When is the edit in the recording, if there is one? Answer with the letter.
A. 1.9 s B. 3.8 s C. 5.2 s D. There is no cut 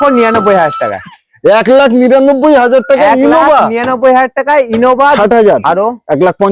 C